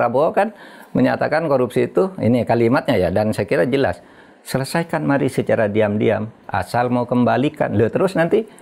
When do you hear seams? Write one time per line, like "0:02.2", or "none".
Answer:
none

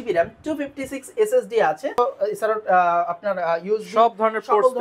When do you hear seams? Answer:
0:02.0

